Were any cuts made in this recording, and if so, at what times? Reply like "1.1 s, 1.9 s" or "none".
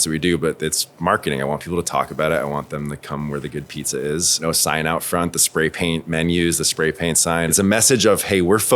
4.4 s, 7.5 s